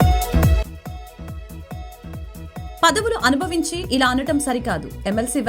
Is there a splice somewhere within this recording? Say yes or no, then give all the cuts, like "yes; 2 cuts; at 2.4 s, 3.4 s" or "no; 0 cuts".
yes; 1 cut; at 2.2 s